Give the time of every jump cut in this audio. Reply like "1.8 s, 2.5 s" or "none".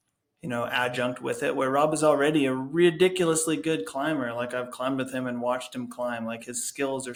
none